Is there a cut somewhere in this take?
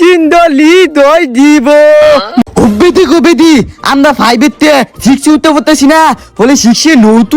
yes; 1 cut; at 2.3 s

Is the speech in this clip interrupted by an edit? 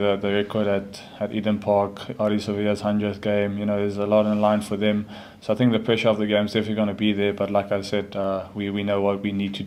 no; 0 cuts

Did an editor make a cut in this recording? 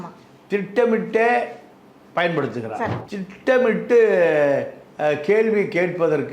yes; 1 cut; at 3.0 s

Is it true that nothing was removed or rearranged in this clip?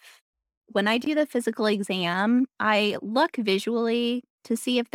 yes; 0 cuts

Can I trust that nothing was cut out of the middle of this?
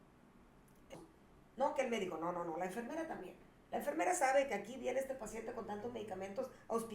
no; 1 cut; at 0.9 s

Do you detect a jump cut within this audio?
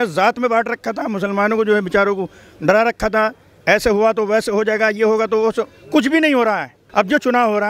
yes; 1 cut; at 6.8 s

